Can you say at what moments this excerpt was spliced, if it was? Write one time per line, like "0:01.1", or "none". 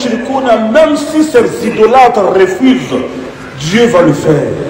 none